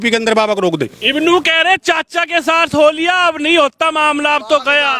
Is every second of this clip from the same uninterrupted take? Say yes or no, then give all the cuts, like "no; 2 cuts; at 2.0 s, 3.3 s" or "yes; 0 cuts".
yes; 0 cuts